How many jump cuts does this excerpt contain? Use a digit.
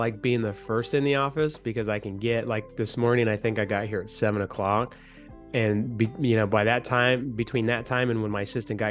0